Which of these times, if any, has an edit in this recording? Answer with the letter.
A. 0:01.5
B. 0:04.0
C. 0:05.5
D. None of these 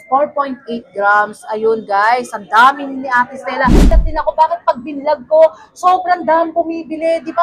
B